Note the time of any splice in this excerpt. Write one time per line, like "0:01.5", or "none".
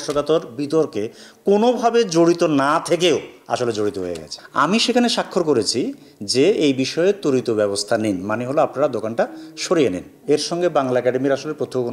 0:04.4
0:10.1